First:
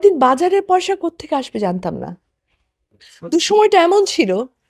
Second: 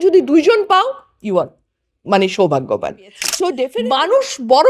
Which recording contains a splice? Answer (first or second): second